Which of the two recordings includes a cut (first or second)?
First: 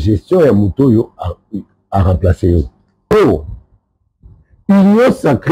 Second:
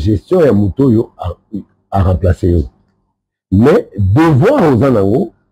first